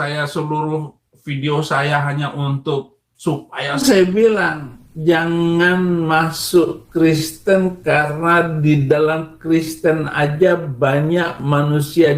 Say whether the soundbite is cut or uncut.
cut